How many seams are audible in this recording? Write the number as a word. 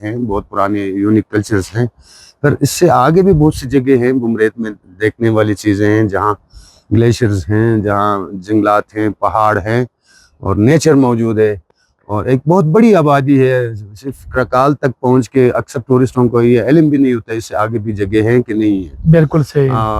zero